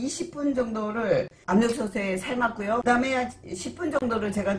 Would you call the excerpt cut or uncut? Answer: cut